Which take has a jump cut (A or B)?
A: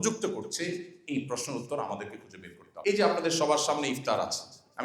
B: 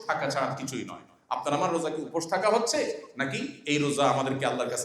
A